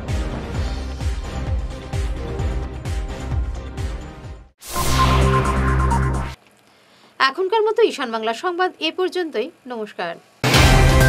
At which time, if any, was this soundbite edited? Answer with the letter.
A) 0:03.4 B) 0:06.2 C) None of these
C